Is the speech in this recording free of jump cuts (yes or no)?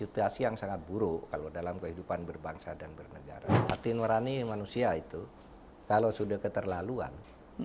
no